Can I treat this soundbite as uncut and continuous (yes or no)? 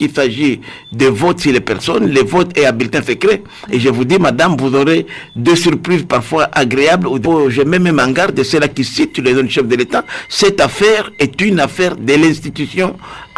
no